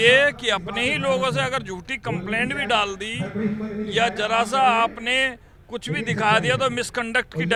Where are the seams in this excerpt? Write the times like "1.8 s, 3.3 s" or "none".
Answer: none